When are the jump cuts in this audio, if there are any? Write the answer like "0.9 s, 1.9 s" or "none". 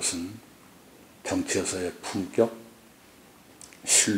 none